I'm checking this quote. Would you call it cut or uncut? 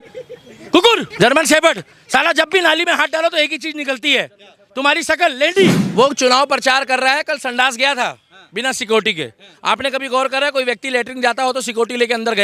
cut